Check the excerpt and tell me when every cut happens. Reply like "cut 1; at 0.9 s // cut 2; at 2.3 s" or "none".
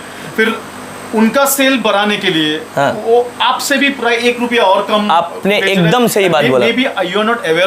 none